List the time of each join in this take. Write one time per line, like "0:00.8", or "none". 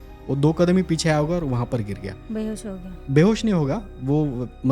none